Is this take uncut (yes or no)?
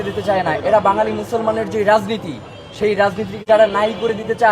no